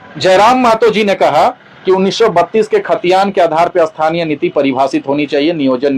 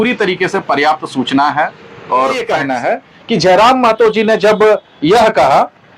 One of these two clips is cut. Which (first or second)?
second